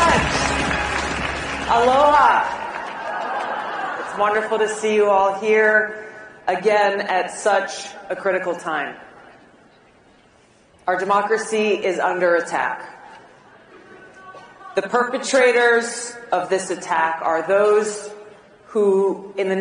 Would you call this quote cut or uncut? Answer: cut